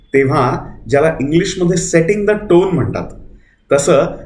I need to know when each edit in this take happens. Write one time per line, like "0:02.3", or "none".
none